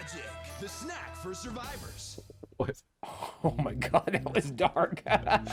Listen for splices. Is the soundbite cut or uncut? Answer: uncut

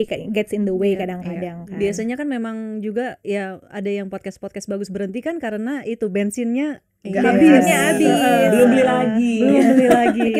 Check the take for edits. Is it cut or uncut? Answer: uncut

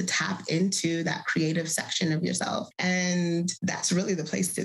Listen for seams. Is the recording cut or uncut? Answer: cut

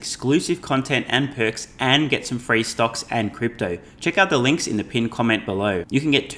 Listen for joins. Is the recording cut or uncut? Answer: uncut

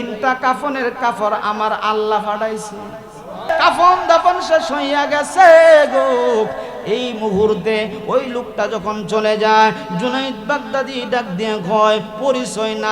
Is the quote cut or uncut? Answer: cut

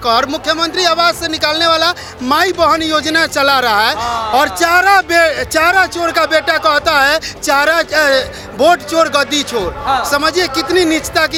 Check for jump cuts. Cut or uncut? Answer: uncut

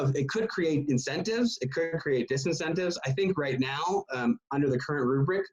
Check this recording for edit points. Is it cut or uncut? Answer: uncut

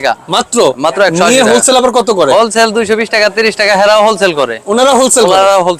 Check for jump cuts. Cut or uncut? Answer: uncut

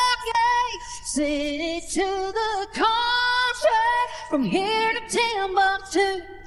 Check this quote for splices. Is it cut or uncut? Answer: uncut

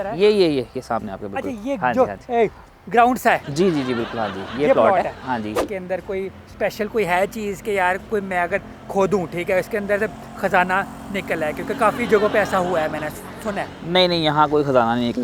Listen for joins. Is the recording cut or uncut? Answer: cut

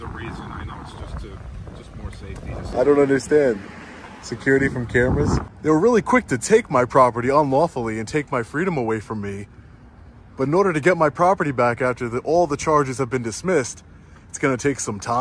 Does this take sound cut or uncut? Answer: cut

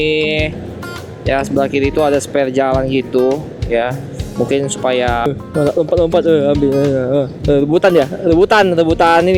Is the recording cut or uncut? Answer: cut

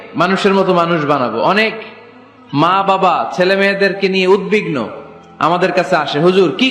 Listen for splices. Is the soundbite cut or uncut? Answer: uncut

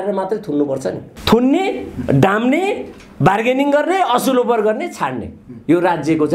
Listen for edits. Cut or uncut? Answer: cut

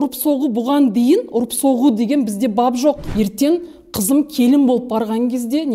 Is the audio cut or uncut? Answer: cut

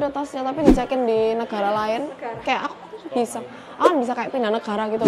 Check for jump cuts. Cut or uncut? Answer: uncut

